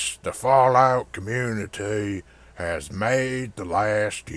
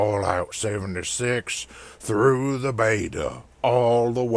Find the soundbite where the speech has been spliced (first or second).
second